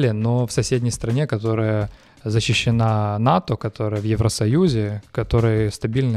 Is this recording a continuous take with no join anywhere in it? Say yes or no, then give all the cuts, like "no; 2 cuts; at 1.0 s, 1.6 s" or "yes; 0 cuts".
yes; 0 cuts